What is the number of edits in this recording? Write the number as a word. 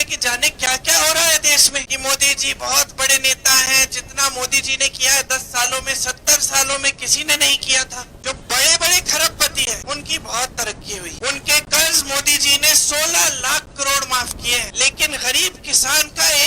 five